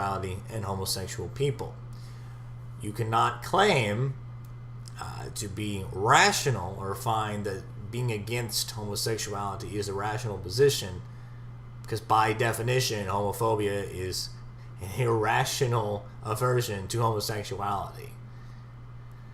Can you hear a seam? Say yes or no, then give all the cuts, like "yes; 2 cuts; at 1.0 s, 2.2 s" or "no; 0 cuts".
yes; 1 cut; at 3.8 s